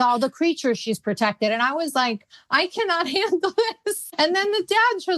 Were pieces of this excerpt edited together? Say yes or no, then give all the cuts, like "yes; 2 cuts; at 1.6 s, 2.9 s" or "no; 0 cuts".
yes; 1 cut; at 4.1 s